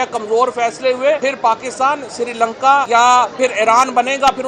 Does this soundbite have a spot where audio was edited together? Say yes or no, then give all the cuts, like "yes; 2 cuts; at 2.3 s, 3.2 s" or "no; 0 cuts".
yes; 2 cuts; at 1.2 s, 2.9 s